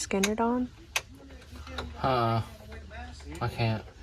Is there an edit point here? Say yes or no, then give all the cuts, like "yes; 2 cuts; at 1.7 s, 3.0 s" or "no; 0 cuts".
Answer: no; 0 cuts